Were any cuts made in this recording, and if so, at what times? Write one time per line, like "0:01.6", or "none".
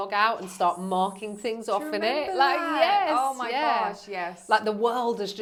none